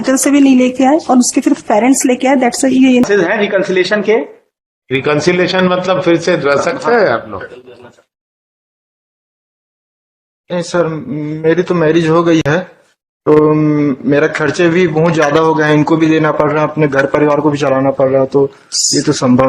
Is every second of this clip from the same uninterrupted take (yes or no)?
no